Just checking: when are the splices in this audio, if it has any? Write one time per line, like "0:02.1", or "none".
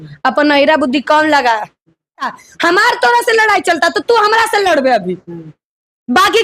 0:02.3